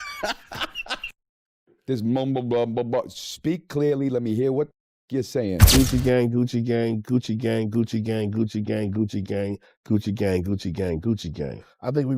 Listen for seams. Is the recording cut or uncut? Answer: cut